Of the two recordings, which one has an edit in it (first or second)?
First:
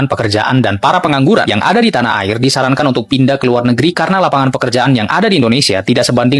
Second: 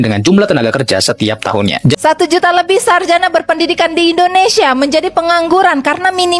second